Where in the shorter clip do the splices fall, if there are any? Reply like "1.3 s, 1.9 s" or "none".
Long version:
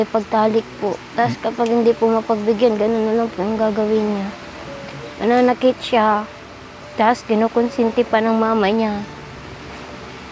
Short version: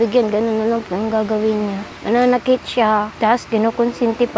1.9 s, 3.1 s